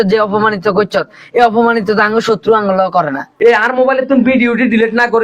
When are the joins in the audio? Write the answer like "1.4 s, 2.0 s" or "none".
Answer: 3.2 s